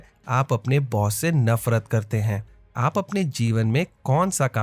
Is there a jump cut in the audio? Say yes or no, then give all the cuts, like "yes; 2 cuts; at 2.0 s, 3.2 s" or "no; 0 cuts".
yes; 1 cut; at 2.5 s